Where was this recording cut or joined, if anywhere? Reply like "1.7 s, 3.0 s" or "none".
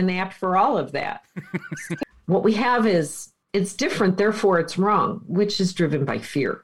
2.0 s